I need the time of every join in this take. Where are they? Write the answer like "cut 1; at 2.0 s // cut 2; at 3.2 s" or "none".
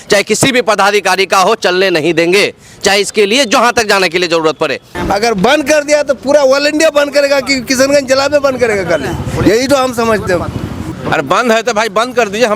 cut 1; at 4.9 s // cut 2; at 10.8 s